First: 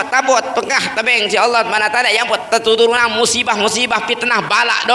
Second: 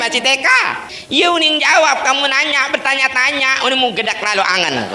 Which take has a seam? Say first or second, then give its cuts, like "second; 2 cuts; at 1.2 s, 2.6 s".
second; 1 cut; at 0.9 s